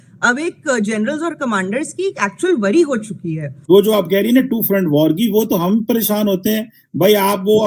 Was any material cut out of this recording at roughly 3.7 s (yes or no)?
no